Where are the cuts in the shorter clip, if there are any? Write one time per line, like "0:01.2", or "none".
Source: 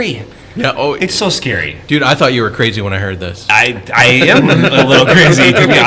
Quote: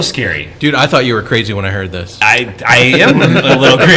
none